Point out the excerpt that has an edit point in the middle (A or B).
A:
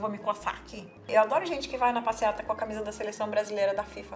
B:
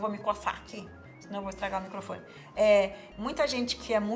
A